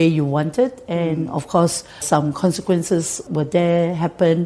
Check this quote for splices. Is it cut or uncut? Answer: cut